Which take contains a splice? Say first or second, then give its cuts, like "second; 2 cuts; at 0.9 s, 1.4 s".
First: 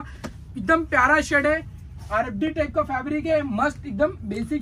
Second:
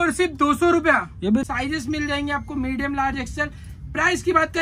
second; 1 cut; at 1.4 s